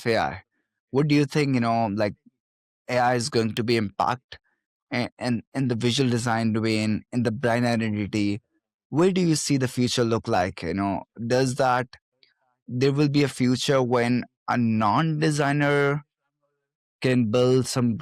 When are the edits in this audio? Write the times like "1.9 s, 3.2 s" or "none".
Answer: none